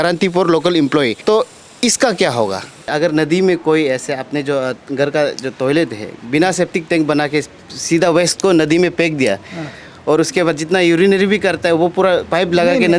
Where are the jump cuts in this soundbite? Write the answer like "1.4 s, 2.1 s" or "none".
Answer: 2.9 s